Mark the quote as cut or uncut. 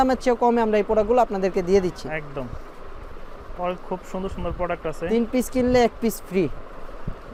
uncut